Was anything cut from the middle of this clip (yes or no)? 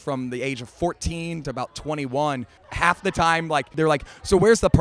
yes